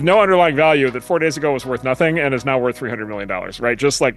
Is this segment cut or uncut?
uncut